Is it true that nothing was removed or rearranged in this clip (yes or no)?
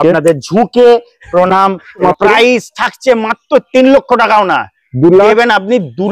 no